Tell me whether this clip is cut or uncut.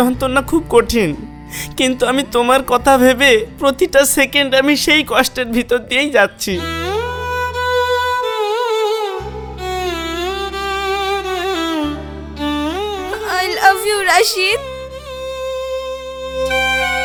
uncut